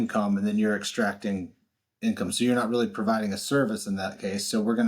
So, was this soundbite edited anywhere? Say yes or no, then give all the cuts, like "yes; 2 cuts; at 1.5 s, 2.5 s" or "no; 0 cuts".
no; 0 cuts